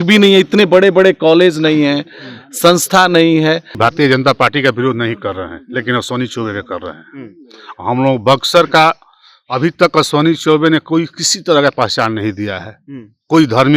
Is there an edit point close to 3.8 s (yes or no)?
yes